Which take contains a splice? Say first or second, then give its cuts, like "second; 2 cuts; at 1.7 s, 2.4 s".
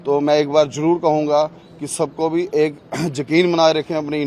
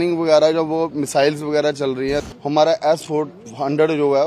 second; 1 cut; at 2.2 s